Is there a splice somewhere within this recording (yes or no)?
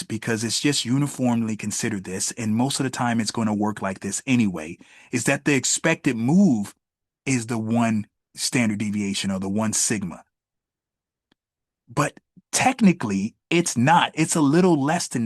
yes